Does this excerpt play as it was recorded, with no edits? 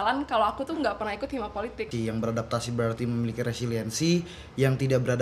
no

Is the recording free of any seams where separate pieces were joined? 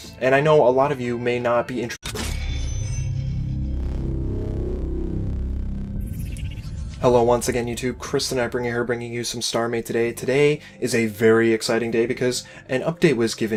yes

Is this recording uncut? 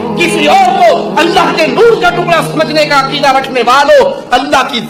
yes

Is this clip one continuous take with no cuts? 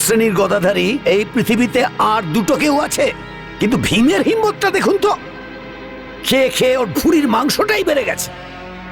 yes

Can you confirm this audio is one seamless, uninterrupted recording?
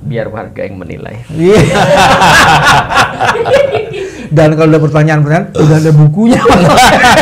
yes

